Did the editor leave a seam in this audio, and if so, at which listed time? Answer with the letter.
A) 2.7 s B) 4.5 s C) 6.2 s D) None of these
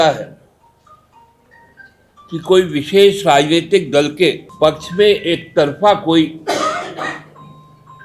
B